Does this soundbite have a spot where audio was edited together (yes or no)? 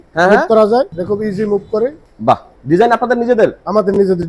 yes